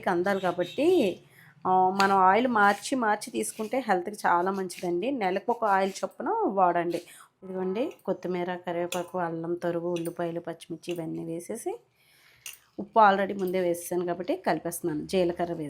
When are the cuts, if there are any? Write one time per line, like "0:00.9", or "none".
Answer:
0:07.4